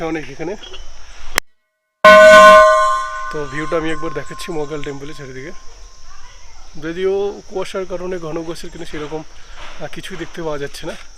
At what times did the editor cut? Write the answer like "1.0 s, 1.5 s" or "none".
none